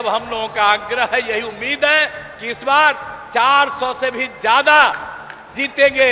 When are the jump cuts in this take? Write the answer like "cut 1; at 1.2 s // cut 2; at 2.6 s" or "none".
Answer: none